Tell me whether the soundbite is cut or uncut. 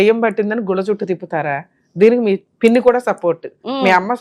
cut